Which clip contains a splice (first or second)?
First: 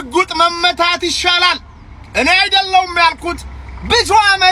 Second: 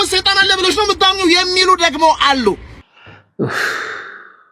second